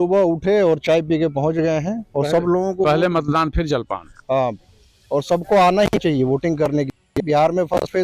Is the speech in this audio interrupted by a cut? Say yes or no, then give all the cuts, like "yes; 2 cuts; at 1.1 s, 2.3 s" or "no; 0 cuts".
no; 0 cuts